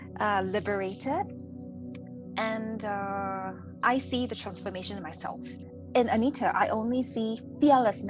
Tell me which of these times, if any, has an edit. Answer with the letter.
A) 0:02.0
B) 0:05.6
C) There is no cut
B